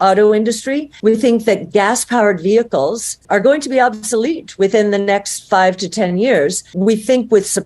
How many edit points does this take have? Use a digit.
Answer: 3